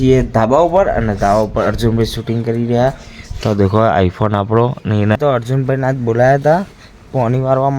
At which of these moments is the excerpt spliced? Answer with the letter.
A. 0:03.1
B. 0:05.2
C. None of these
B